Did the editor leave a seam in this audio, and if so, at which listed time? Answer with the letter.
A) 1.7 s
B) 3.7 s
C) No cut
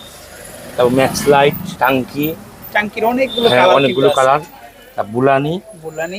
A